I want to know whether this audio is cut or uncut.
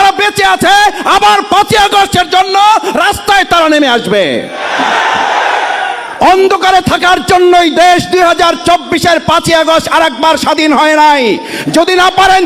cut